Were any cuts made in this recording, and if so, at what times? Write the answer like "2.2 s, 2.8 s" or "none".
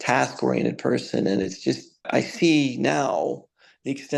2.1 s

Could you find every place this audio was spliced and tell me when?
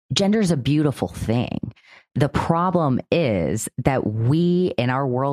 none

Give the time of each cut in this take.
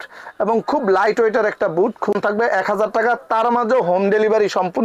2.2 s

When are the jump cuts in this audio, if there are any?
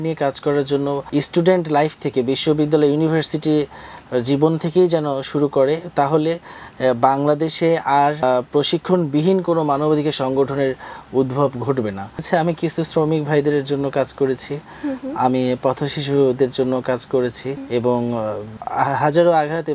1.0 s, 8.2 s, 12.2 s, 17.5 s, 18.5 s

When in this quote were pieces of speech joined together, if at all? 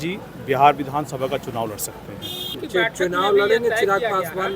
2.6 s

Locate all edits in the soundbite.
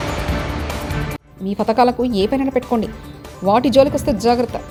none

